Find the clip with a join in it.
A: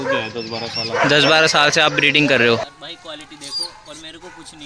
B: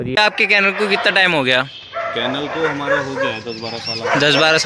A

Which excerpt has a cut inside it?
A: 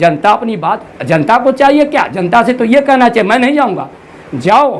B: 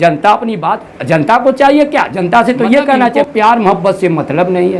B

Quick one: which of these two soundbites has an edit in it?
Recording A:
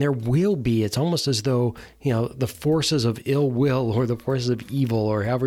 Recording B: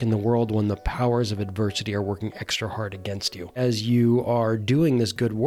B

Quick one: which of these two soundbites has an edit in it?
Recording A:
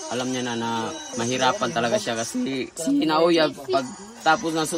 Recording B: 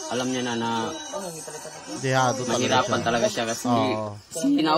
A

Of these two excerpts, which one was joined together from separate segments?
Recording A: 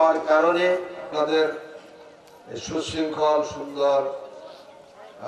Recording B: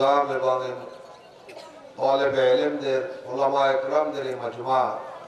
A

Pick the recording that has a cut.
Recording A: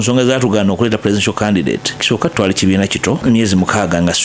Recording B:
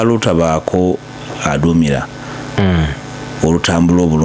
A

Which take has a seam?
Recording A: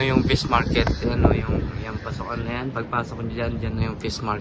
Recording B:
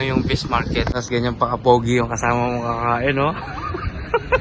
B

